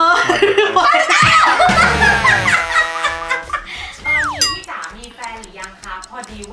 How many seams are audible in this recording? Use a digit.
1